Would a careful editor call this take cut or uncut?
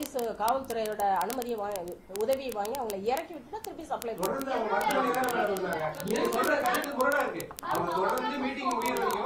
uncut